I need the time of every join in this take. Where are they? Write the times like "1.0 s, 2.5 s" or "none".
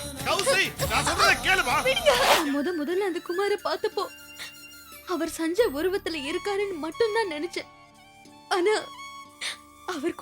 2.4 s